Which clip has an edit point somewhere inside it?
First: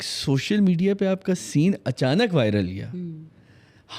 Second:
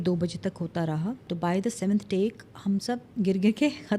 second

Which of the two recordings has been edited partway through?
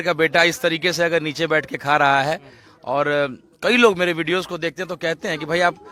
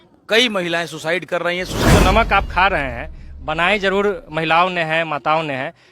second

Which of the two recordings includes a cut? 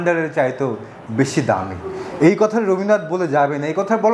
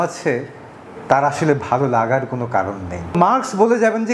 second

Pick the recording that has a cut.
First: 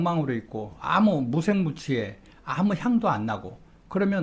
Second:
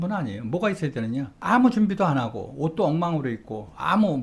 second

